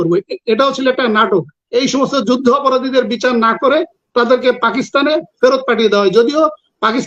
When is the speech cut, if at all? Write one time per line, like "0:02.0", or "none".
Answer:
0:01.6

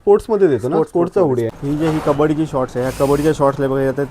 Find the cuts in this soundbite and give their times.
0:01.5

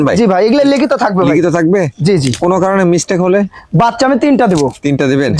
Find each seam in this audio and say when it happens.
none

